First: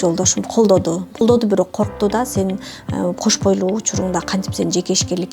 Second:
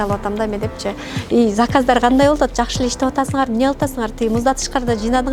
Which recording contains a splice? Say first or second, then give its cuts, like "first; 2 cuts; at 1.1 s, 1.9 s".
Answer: first; 1 cut; at 1.2 s